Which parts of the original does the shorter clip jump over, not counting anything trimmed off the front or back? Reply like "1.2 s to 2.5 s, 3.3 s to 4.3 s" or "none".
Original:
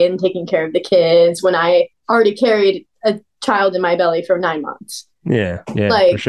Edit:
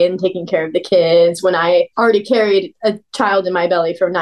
1.9 s to 2.0 s, 3.0 s to 3.2 s